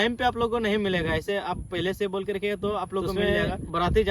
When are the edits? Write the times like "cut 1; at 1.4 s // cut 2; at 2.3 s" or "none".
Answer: cut 1; at 3.1 s

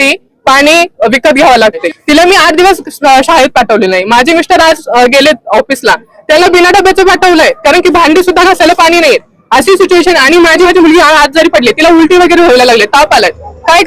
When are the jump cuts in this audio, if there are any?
cut 1; at 1.9 s // cut 2; at 10.7 s

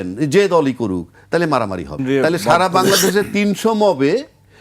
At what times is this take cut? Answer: cut 1; at 2.0 s

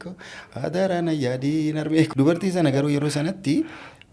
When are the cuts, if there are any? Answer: cut 1; at 2.1 s

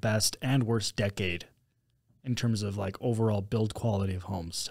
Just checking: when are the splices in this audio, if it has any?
none

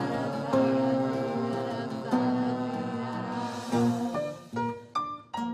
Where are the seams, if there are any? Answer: none

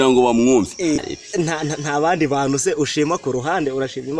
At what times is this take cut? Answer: cut 1; at 1.0 s

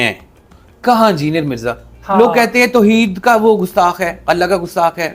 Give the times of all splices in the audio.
cut 1; at 2.0 s

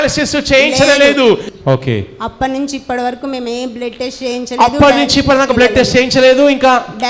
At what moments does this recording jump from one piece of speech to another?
cut 1; at 1.5 s

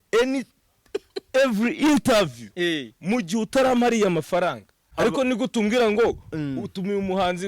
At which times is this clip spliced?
cut 1; at 4.9 s

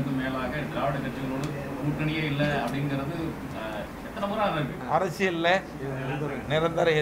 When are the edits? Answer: cut 1; at 4.8 s

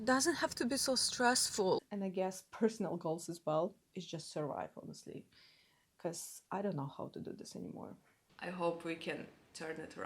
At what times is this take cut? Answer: cut 1; at 1.8 s // cut 2; at 8.3 s

